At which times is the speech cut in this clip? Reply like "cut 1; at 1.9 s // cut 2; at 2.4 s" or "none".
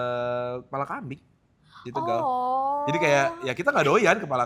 none